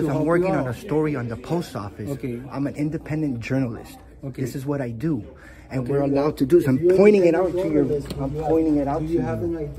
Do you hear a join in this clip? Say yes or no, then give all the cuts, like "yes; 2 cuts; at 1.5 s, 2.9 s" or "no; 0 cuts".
no; 0 cuts